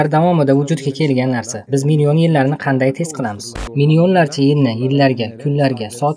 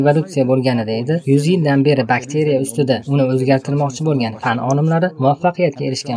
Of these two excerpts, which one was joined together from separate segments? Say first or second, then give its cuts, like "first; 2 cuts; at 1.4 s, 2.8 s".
first; 1 cut; at 3.5 s